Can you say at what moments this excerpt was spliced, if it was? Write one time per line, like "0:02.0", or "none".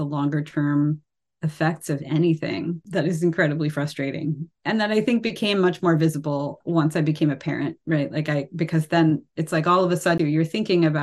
0:02.8
0:04.5
0:06.5
0:10.2